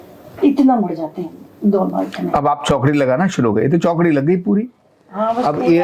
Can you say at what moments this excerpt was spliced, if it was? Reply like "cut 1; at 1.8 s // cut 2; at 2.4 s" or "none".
none